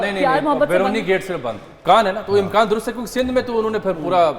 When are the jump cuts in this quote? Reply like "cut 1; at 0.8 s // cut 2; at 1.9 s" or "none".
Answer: cut 1; at 1.7 s